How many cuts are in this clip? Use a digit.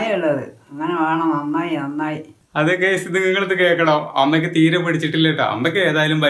1